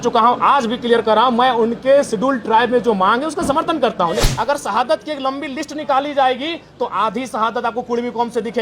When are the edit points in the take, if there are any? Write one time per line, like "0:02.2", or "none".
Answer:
0:04.3